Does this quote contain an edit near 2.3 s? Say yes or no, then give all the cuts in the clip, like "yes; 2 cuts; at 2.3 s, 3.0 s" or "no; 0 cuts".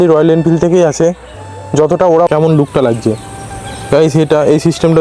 yes; 1 cut; at 2.3 s